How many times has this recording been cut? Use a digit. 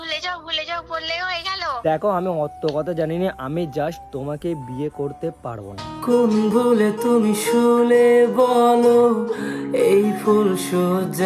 0